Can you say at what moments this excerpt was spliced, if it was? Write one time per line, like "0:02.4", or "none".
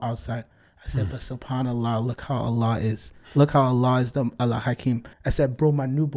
0:05.2